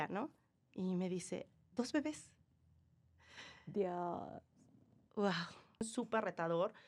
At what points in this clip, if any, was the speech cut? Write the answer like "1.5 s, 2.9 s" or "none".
5.9 s